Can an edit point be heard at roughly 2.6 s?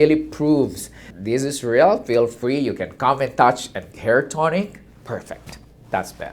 no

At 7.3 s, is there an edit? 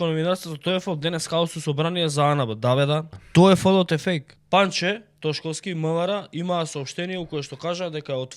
no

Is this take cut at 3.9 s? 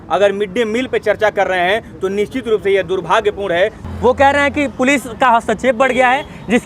yes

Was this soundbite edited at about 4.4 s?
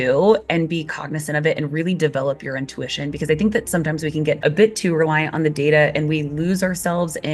yes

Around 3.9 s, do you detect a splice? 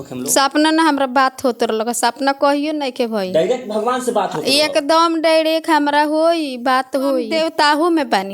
no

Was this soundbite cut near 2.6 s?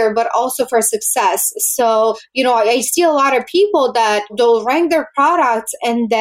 no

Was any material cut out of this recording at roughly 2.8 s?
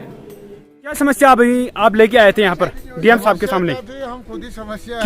no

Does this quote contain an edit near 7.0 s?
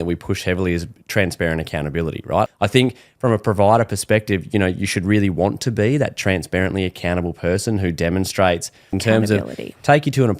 no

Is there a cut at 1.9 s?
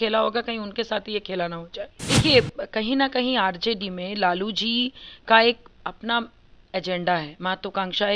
yes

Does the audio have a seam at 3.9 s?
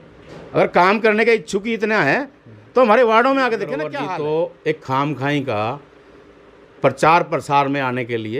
yes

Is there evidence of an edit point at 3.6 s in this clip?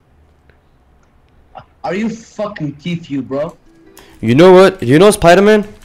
yes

